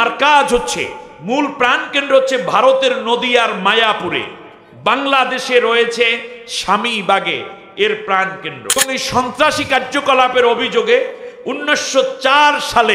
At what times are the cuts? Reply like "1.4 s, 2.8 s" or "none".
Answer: 8.8 s